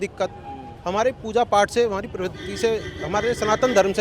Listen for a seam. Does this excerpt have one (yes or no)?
no